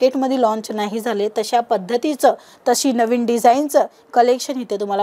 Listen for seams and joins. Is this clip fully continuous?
yes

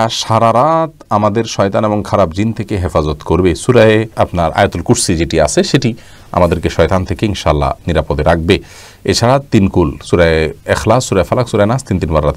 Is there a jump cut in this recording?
no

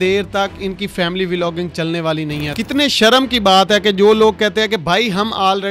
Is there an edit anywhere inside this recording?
yes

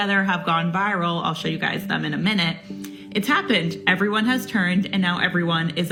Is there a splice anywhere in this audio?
no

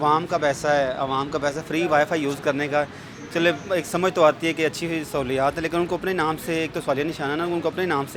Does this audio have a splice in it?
no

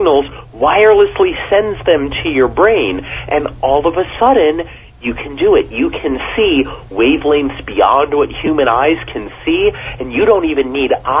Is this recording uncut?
yes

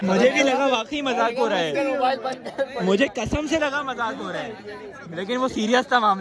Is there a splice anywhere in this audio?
no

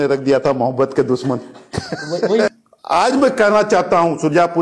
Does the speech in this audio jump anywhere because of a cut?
yes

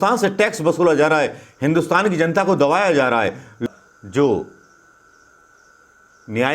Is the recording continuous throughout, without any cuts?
no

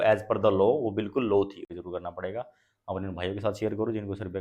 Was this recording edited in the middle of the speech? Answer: yes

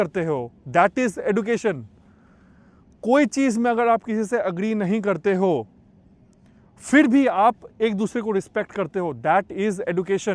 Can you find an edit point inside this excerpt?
no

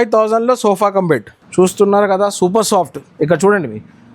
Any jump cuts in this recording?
yes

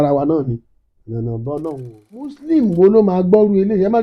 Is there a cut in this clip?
yes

